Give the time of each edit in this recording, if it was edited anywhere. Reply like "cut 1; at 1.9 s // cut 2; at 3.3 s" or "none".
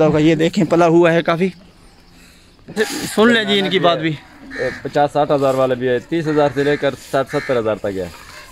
cut 1; at 2.8 s